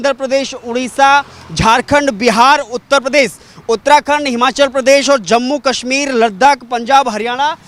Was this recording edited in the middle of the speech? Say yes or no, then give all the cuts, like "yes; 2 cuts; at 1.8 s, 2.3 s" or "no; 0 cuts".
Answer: no; 0 cuts